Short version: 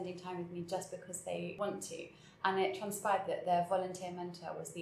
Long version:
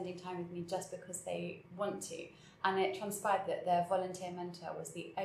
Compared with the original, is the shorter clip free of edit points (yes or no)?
no